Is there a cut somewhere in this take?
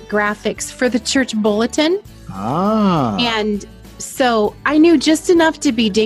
no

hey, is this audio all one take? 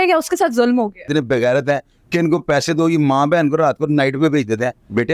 no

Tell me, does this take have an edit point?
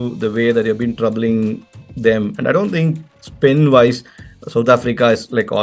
no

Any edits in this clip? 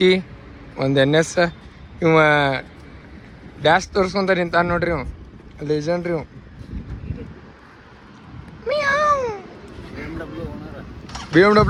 no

